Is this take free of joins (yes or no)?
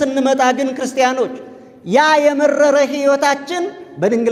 yes